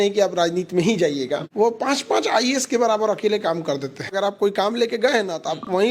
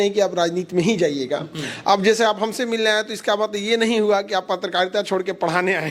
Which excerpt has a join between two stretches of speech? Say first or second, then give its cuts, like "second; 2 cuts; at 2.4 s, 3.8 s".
first; 2 cuts; at 1.4 s, 4.1 s